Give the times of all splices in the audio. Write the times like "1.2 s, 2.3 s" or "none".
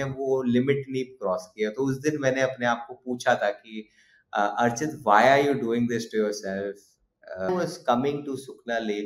7.5 s